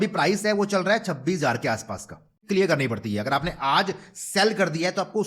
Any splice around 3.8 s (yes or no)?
no